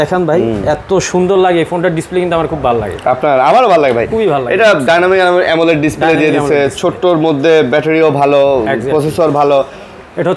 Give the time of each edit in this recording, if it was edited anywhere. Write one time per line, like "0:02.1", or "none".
none